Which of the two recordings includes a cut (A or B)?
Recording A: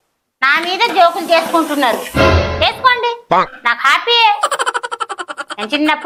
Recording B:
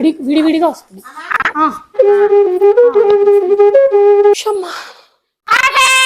B